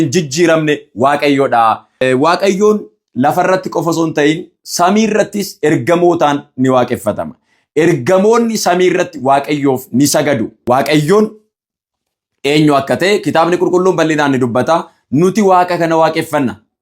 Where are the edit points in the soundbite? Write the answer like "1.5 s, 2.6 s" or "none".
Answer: 2.0 s, 10.5 s